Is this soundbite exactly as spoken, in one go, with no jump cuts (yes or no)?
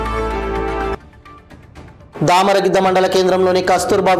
yes